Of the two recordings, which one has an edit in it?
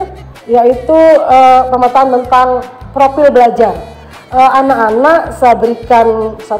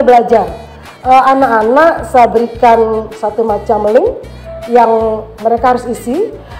second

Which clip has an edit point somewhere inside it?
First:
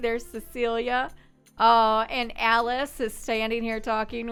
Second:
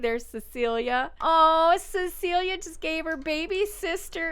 second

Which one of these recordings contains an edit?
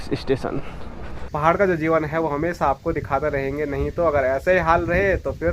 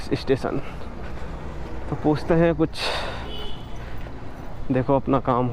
first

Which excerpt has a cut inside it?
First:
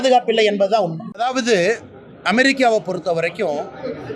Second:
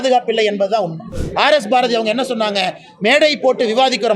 second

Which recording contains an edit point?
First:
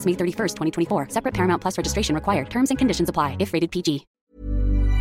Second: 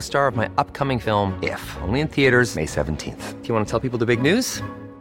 first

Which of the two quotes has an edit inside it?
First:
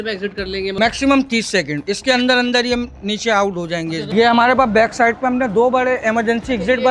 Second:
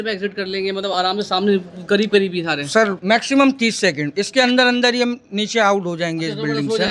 first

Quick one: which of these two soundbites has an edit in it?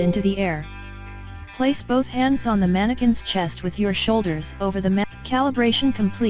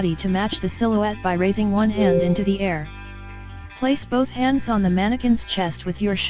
first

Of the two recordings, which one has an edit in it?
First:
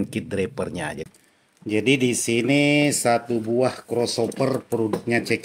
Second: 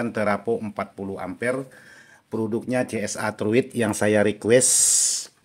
first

